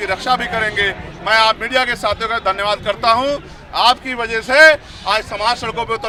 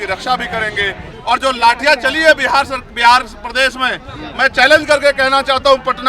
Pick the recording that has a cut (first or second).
second